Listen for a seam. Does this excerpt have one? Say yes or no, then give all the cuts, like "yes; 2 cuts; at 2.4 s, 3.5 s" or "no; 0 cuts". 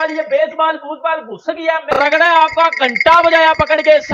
yes; 1 cut; at 1.8 s